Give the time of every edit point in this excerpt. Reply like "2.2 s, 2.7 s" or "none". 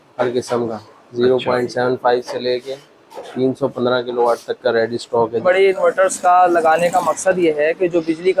5.4 s